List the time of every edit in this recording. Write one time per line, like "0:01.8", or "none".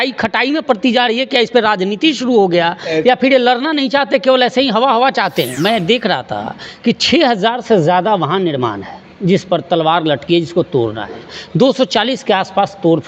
0:05.5

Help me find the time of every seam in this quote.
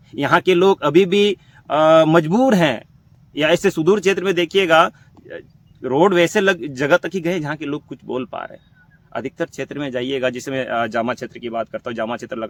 none

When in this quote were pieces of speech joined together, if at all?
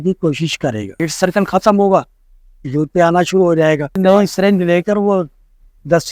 0:01.0
0:04.0

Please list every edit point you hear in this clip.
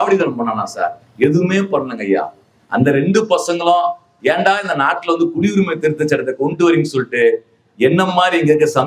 0:04.1

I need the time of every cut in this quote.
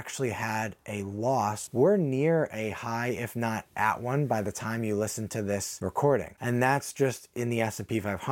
0:01.6

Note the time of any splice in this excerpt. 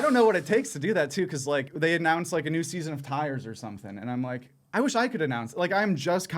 0:01.7

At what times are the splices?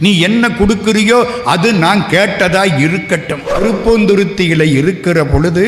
0:03.6

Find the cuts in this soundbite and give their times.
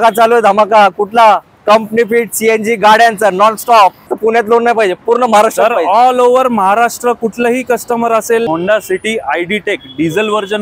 0:04.1
0:08.5

